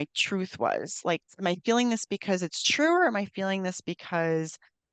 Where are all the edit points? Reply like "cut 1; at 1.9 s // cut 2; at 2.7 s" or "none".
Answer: cut 1; at 1.3 s

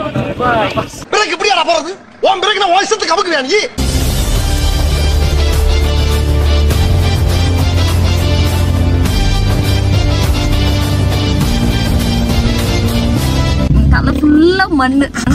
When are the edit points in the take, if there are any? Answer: cut 1; at 0.9 s // cut 2; at 3.8 s // cut 3; at 13.7 s

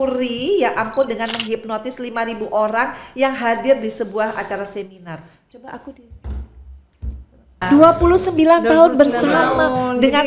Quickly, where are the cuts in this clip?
cut 1; at 7.6 s

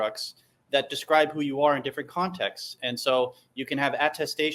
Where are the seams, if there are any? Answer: cut 1; at 2.8 s

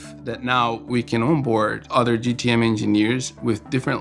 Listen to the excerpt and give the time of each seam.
cut 1; at 1.8 s

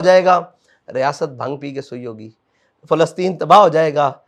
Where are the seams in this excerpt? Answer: none

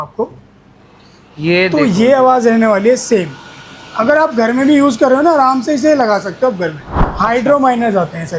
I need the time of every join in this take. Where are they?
cut 1; at 6.9 s

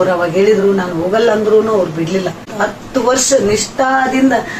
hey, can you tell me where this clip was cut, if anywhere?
cut 1; at 2.5 s

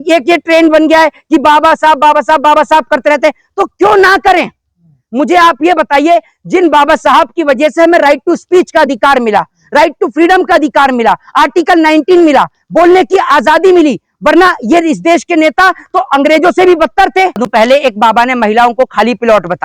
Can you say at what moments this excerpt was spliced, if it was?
cut 1; at 17.4 s

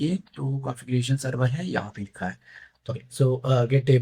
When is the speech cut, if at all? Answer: cut 1; at 2.9 s

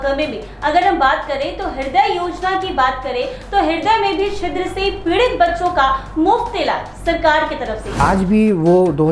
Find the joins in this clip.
cut 1; at 7.9 s

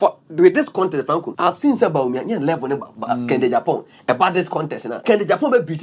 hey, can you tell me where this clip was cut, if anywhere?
cut 1; at 1.3 s // cut 2; at 4.9 s

